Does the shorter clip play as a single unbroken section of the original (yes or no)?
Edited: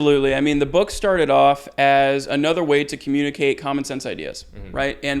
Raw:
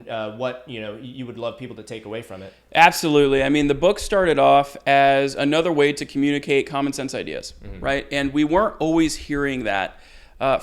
yes